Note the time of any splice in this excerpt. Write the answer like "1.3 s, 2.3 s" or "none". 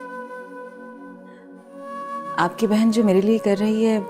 3.1 s